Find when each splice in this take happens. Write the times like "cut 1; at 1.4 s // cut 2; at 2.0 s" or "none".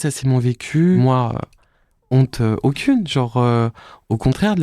cut 1; at 1.0 s